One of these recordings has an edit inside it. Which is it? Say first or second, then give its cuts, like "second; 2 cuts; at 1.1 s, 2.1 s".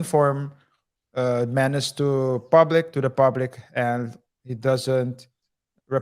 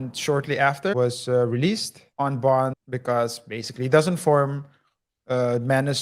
second; 3 cuts; at 0.9 s, 2.0 s, 2.9 s